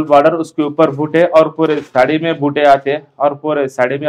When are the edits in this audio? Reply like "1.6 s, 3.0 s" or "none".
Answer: none